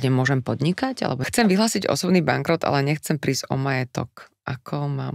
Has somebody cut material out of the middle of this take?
yes; 1 cut; at 1.2 s

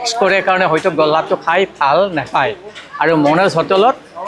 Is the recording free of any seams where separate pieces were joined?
yes; 0 cuts

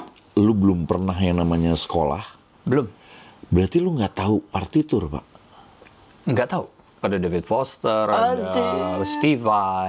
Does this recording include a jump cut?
yes; 1 cut; at 7.0 s

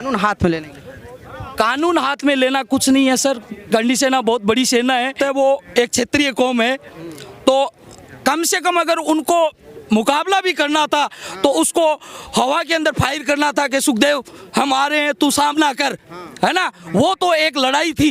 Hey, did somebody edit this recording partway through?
yes; 1 cut; at 5.2 s

